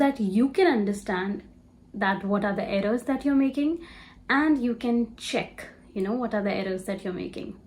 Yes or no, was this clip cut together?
no